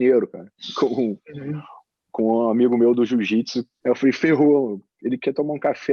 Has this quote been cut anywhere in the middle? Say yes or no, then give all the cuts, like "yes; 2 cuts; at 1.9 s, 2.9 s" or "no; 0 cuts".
yes; 1 cut; at 3.6 s